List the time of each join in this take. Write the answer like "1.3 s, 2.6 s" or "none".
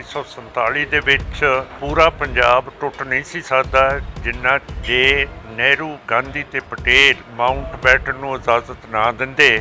1.7 s, 7.3 s

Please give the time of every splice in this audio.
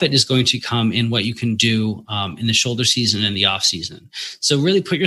none

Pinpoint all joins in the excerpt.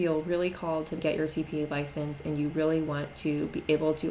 1.0 s

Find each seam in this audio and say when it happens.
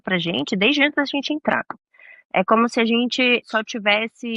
3.5 s

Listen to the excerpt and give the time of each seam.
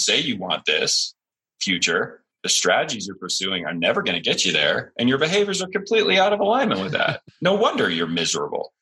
2.3 s, 7.2 s

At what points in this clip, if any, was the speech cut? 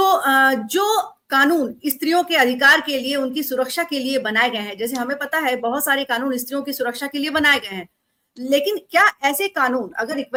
none

